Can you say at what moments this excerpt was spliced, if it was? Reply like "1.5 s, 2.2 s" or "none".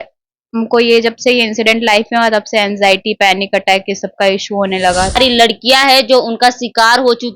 5.2 s